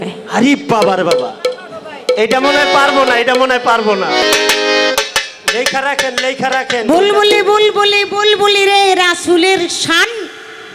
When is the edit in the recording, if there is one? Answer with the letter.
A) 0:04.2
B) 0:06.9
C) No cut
A